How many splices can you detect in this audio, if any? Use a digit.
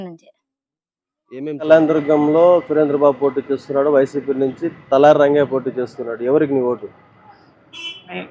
1